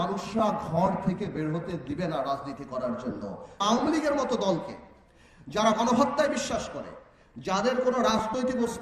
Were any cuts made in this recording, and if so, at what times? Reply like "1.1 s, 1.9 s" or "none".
3.6 s